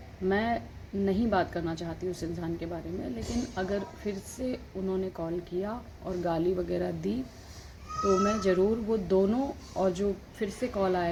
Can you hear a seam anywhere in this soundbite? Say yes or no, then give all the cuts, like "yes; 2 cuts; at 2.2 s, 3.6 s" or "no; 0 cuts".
no; 0 cuts